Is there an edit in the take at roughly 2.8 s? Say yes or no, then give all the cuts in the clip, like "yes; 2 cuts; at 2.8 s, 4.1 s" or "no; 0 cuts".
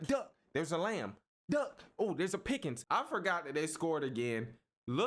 yes; 1 cut; at 2.8 s